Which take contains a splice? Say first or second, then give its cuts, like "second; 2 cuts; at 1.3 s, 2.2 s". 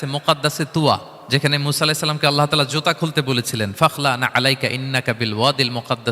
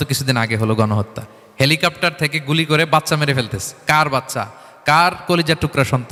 first; 1 cut; at 1.1 s